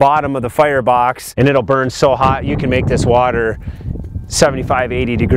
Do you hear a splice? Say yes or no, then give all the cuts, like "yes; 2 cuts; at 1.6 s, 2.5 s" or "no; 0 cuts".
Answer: yes; 1 cut; at 1.2 s